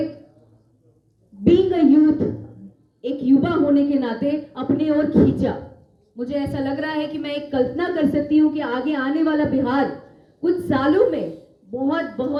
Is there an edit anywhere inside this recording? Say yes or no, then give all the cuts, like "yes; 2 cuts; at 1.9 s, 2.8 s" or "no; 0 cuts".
no; 0 cuts